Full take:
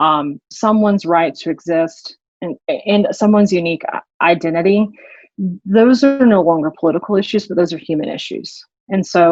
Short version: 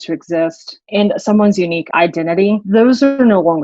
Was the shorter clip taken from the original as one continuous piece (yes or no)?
no